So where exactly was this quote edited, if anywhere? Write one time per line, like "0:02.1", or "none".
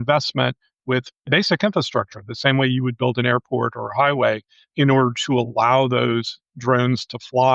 0:01.2